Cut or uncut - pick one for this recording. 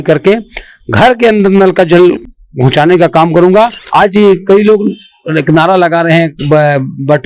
cut